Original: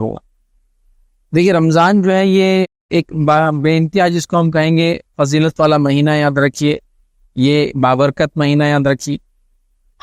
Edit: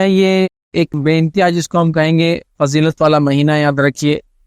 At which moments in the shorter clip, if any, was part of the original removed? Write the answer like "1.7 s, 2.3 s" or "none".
1.0 s